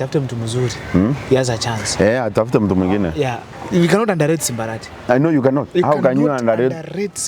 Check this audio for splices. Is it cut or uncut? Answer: cut